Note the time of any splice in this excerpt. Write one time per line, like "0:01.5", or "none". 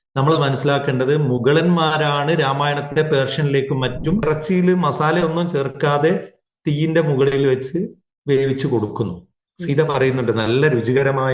0:04.2